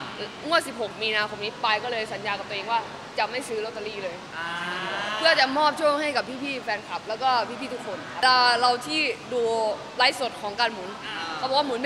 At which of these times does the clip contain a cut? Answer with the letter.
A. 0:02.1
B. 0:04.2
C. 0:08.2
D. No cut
C